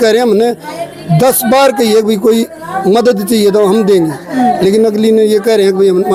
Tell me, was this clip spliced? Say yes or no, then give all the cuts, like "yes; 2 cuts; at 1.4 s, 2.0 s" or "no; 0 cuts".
no; 0 cuts